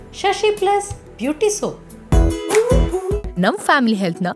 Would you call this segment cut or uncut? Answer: cut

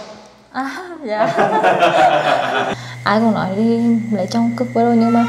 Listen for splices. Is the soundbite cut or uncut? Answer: cut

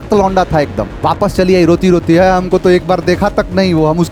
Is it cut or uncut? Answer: uncut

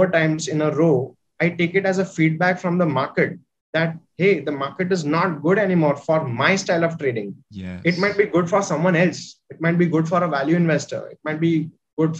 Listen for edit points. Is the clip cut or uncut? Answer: uncut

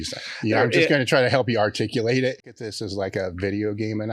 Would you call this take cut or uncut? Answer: cut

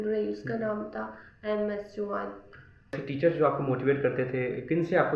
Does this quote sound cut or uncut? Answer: cut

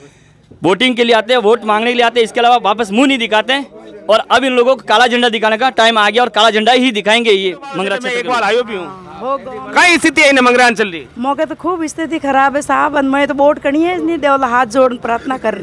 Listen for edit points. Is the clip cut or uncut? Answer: cut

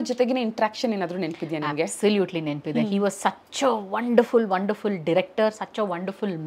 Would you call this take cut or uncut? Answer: uncut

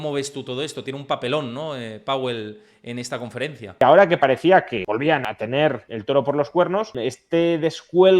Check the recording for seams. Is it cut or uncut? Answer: cut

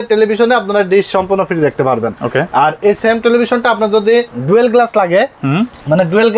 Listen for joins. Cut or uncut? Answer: uncut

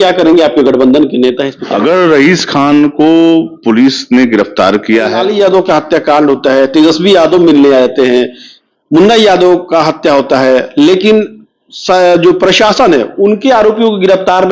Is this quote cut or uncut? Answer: cut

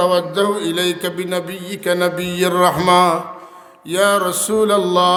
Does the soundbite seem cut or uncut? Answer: uncut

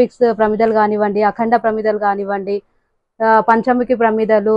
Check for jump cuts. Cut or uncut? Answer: uncut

